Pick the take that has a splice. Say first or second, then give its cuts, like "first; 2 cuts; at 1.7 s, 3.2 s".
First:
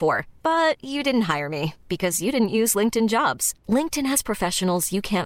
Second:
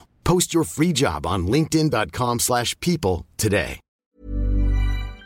second; 1 cut; at 3.9 s